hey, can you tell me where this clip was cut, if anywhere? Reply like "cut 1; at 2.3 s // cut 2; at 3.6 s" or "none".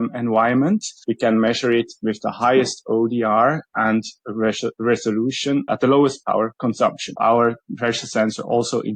cut 1; at 1.0 s // cut 2; at 5.7 s // cut 3; at 7.1 s

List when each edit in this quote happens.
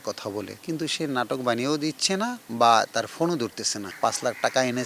cut 1; at 3.9 s

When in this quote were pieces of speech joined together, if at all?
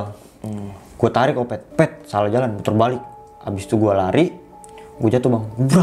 cut 1; at 1.7 s

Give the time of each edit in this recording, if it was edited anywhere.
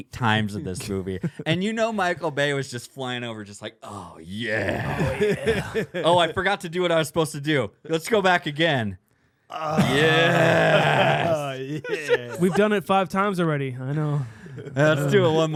none

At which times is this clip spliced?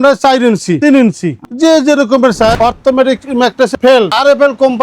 cut 1; at 2.5 s // cut 2; at 3.7 s

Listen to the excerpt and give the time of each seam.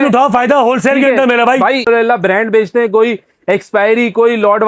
cut 1; at 1.9 s

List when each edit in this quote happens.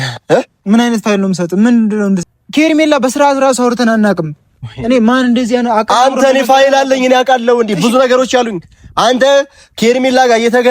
cut 1; at 2.3 s

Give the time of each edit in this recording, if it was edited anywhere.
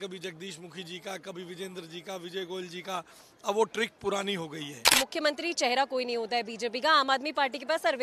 cut 1; at 4.9 s

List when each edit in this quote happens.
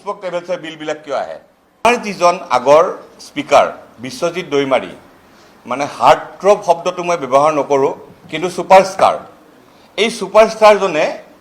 cut 1; at 1.9 s

